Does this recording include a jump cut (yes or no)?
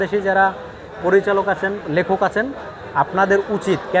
no